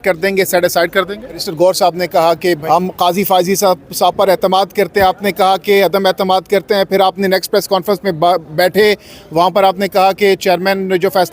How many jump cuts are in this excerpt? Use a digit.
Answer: 2